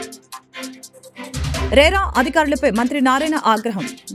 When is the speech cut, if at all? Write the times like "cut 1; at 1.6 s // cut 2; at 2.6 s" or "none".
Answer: cut 1; at 1.7 s